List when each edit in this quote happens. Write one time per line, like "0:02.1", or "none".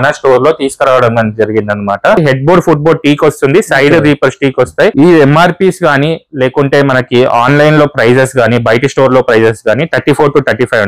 0:02.2
0:04.9